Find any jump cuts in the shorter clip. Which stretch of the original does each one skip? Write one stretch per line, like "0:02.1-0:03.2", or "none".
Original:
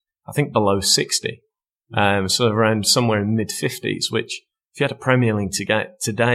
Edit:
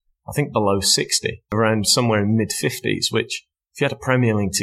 0:01.5-0:02.5